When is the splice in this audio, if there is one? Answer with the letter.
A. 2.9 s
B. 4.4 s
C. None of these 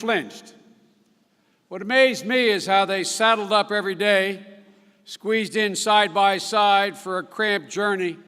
A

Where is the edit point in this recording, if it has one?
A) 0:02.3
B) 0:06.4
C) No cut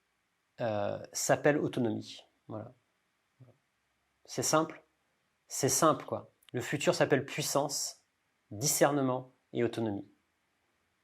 B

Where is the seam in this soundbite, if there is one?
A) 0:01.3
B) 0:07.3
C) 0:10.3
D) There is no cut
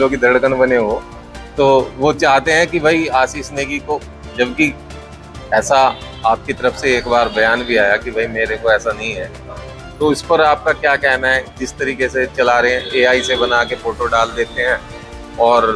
D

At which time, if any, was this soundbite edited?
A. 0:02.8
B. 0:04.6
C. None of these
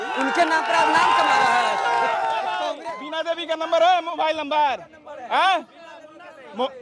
A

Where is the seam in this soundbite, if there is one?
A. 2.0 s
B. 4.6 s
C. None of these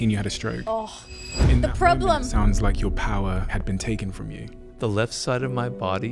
C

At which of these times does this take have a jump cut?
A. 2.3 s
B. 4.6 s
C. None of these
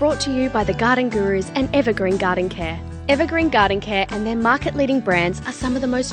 C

